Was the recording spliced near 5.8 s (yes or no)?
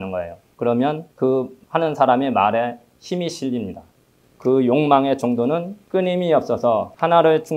yes